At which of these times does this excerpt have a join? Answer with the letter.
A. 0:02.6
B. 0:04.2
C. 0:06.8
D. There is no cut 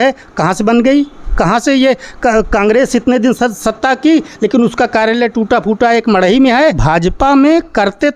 C